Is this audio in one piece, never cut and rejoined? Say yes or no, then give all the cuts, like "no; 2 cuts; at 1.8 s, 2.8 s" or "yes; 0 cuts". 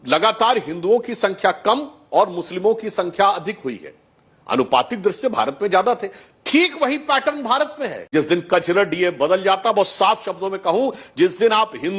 no; 1 cut; at 8.0 s